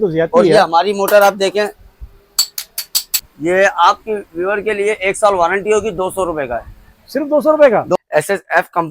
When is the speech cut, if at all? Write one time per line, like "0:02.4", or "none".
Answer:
0:03.2
0:08.0

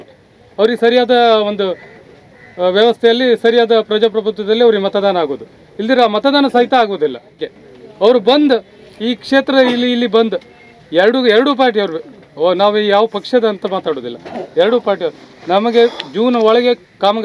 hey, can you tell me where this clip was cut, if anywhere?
0:07.3

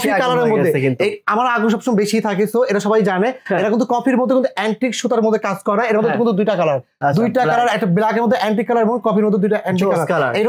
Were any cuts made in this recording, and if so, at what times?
none

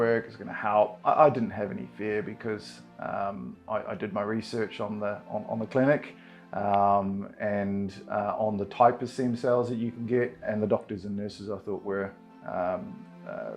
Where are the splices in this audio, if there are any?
0:01.0
0:10.5

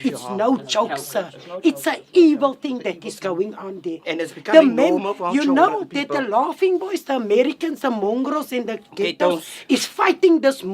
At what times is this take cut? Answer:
0:07.5

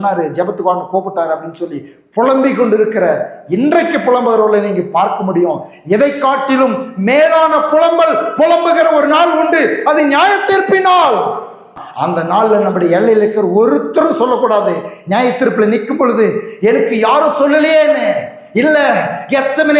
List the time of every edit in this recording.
0:11.8

